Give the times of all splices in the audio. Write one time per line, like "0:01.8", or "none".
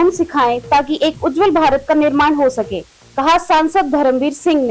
none